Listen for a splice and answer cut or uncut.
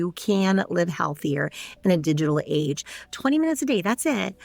cut